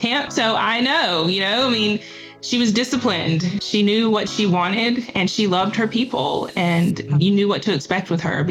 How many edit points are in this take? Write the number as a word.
one